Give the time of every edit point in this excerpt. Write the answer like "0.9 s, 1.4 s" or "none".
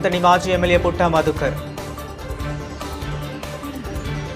1.5 s